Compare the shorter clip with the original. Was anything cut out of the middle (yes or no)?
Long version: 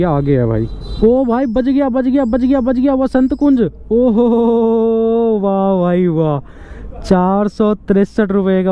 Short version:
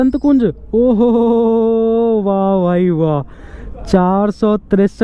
no